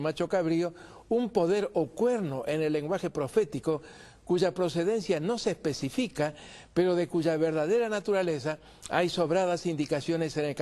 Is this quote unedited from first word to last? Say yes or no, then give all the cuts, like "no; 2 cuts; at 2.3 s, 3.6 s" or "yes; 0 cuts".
no; 1 cut; at 5.4 s